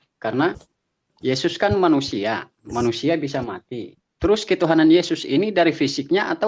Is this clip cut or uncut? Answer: uncut